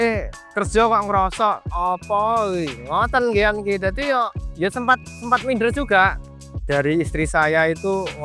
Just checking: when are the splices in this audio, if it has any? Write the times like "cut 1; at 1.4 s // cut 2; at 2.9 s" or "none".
cut 1; at 1.7 s // cut 2; at 6.4 s